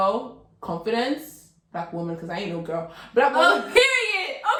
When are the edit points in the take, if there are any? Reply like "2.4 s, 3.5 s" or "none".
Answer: none

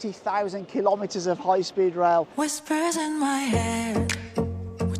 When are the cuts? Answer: 2.3 s

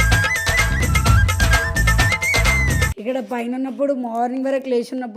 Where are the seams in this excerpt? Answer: 2.9 s

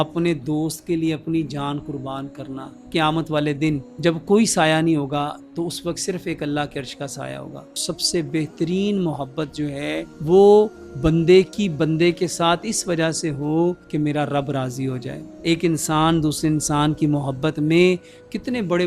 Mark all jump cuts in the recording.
2.7 s, 3.9 s, 7.8 s, 10.1 s, 15.3 s

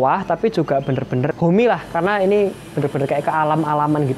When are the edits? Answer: 1.3 s

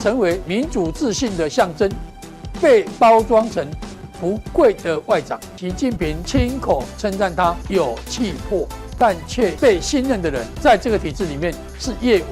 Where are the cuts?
5.8 s, 7.6 s, 9.3 s, 10.5 s

